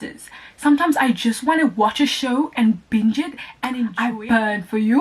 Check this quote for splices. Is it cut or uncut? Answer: cut